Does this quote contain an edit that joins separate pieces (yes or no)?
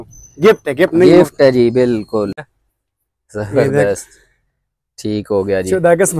yes